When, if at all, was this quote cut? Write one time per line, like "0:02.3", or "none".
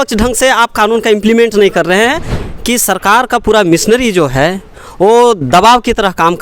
0:02.3